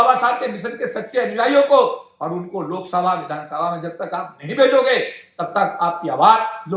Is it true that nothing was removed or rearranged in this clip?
yes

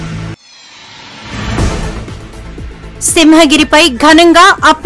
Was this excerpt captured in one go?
no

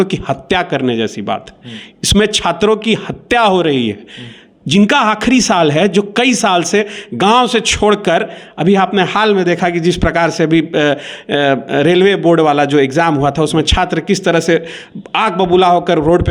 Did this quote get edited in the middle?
no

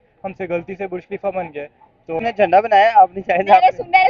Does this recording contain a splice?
yes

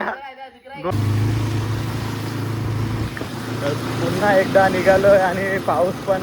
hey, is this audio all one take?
no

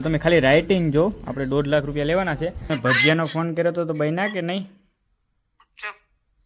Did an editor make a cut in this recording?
yes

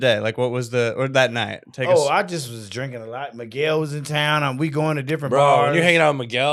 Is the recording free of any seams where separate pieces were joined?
yes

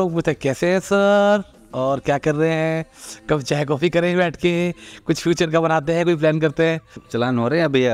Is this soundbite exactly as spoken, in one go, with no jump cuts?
no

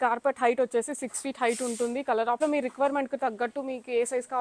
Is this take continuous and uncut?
no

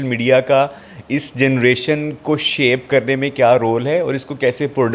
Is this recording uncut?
yes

